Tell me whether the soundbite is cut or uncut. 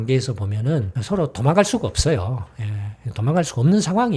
uncut